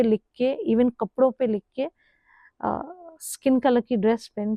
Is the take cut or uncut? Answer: uncut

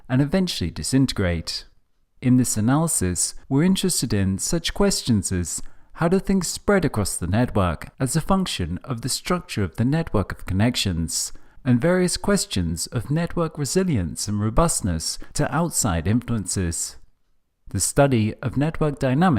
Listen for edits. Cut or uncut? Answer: cut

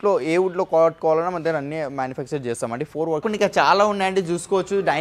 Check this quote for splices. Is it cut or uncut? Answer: cut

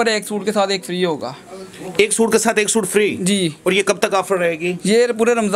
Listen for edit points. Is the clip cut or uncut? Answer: uncut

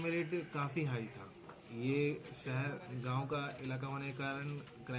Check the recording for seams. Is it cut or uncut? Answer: uncut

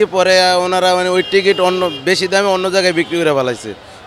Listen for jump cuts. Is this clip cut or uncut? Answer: uncut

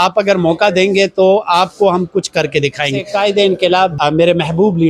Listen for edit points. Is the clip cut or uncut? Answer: cut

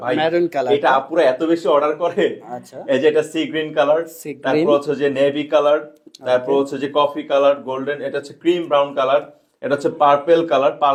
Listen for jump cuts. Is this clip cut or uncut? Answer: uncut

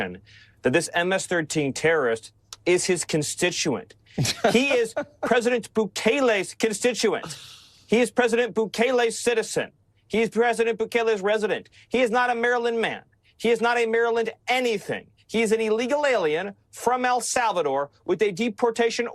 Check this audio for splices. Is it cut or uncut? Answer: uncut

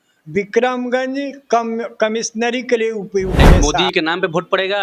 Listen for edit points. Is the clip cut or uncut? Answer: cut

